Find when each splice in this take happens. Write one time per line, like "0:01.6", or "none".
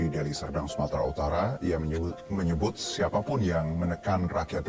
none